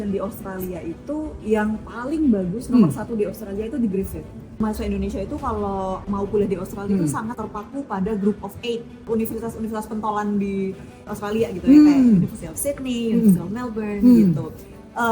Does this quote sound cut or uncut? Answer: cut